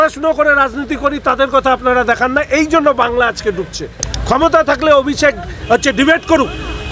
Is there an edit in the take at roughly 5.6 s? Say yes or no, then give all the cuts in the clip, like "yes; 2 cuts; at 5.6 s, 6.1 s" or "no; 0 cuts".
no; 1 cut; at 4.1 s